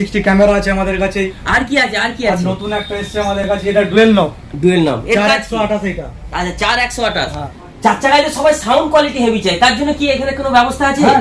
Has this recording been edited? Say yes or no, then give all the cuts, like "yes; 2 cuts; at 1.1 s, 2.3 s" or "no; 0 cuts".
no; 0 cuts